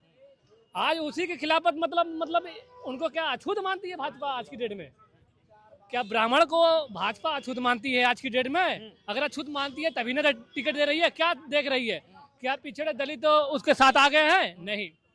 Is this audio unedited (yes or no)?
yes